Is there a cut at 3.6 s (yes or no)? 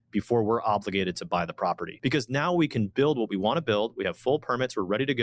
no